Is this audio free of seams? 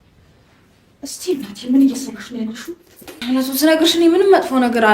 no; 1 cut; at 3.1 s

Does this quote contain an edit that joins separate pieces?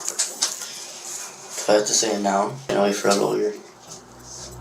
yes; 1 cut; at 2.6 s

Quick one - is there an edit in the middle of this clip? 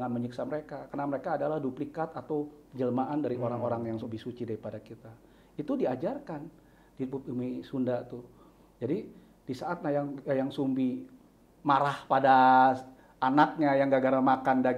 no; 0 cuts

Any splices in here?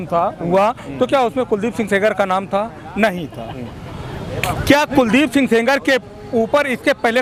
no; 0 cuts

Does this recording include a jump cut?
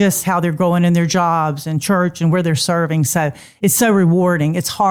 no; 0 cuts

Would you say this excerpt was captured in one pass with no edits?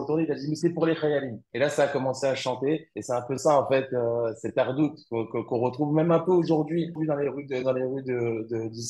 no; 1 cut; at 7.0 s

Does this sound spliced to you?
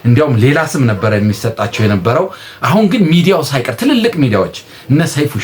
no; 0 cuts

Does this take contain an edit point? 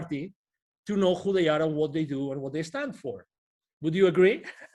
no; 0 cuts

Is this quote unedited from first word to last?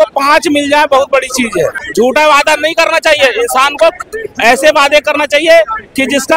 no; 1 cut; at 1.8 s

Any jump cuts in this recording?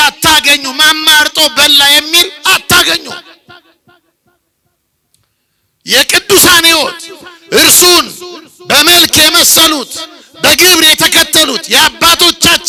no; 0 cuts

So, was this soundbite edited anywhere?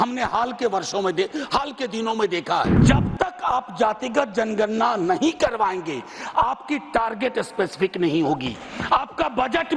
yes; 1 cut; at 2.8 s

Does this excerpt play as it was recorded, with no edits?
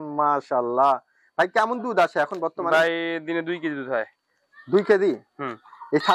yes; 0 cuts

